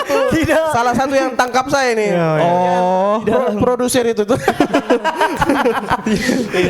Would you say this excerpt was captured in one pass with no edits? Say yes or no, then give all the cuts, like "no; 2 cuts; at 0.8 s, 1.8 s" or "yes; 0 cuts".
yes; 0 cuts